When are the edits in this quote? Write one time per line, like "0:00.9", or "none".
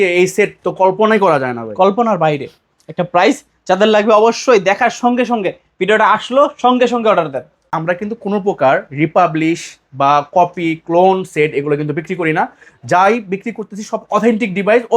0:07.8